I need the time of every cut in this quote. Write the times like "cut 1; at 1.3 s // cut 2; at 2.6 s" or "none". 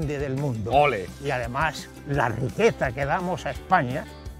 cut 1; at 1.1 s